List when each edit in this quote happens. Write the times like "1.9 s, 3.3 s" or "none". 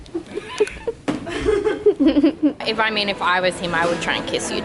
2.6 s